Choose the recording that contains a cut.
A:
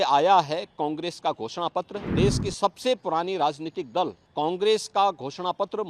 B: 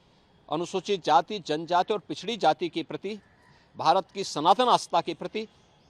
A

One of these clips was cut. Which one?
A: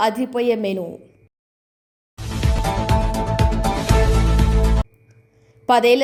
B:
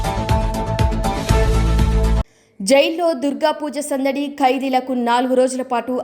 B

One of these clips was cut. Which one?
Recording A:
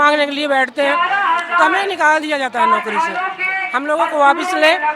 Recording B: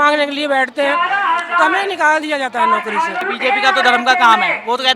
B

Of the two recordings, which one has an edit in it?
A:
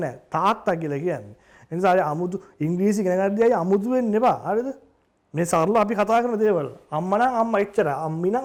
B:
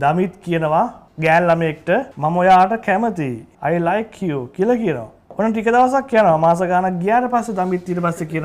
B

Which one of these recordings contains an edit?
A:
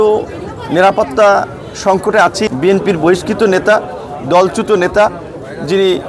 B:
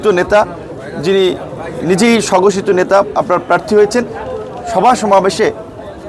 A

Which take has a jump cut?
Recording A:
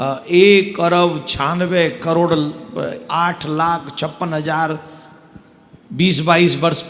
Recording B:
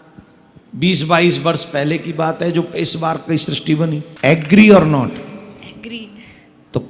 B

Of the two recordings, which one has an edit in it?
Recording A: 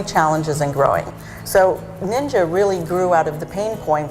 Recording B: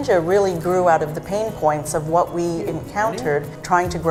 A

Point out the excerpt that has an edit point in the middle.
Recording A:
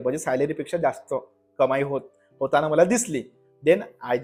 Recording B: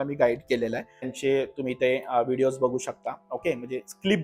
B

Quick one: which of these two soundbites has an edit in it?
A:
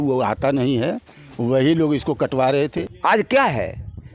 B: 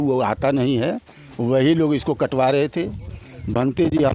A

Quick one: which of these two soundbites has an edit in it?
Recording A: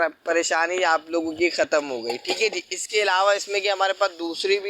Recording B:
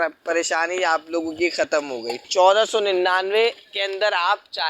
B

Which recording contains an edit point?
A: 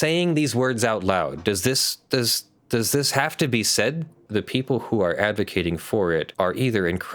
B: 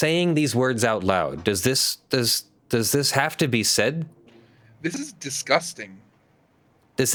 A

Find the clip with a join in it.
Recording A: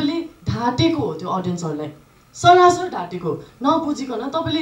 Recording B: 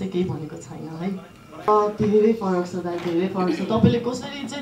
B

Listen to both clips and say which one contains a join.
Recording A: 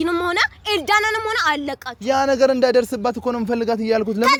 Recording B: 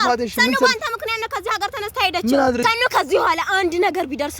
B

